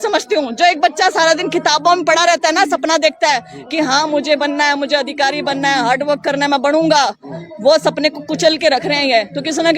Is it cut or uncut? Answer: uncut